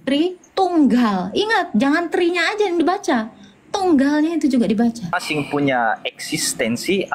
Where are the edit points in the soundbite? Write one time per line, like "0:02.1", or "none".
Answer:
0:05.2